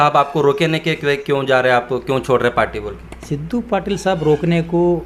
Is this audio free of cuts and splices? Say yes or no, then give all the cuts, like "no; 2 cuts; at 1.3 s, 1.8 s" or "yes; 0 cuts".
yes; 0 cuts